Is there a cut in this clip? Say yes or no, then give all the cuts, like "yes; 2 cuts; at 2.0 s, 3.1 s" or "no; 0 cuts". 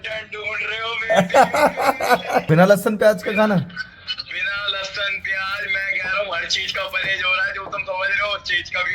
yes; 1 cut; at 2.4 s